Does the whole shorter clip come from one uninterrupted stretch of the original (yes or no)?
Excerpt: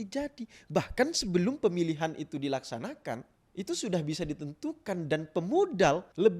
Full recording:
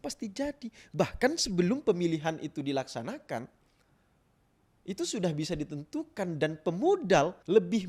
no